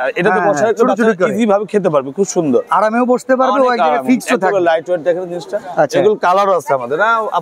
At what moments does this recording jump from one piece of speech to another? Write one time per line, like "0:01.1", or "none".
none

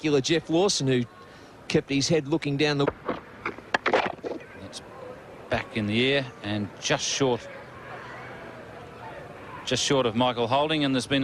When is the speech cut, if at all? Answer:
0:02.9

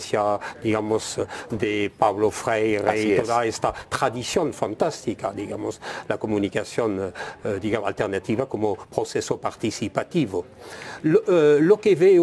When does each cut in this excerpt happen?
none

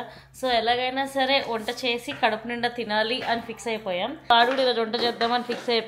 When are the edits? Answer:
0:04.3

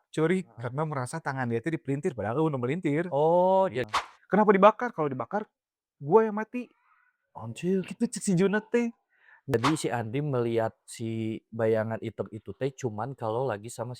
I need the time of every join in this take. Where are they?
0:03.8
0:09.5

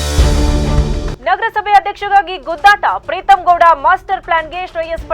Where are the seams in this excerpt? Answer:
0:01.1

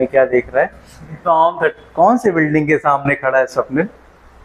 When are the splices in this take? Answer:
0:01.2

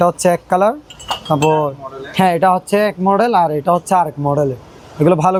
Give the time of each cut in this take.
none

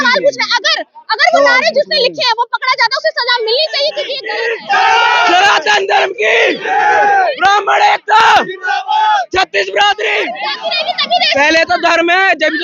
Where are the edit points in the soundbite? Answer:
0:04.1
0:10.5

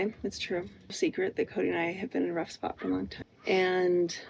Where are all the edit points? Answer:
0:01.0
0:03.2

